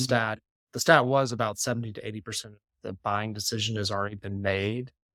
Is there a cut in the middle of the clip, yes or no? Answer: no